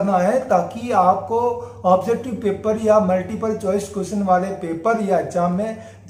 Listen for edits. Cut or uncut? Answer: uncut